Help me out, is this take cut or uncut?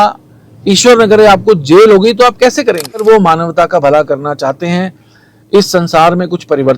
cut